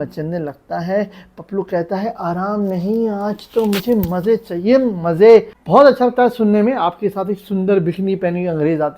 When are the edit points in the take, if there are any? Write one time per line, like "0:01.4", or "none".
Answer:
0:05.5